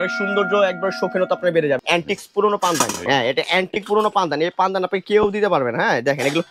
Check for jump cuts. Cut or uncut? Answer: cut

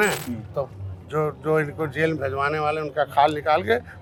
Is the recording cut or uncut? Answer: uncut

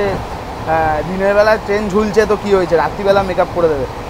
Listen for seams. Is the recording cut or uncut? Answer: uncut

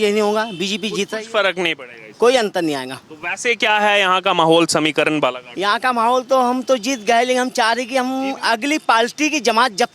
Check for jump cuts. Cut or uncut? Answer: uncut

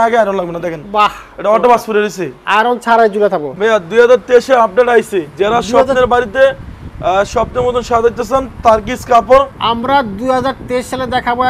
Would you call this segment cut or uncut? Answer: cut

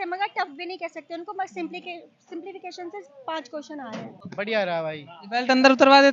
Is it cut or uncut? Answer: cut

